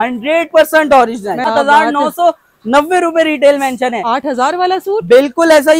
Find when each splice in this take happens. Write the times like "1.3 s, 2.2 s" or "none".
1.5 s